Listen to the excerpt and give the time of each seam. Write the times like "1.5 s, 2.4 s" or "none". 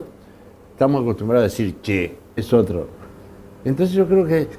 none